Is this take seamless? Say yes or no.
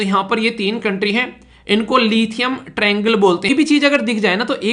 no